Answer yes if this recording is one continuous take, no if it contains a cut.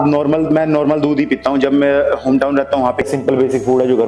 no